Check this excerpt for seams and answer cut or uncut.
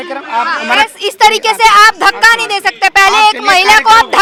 uncut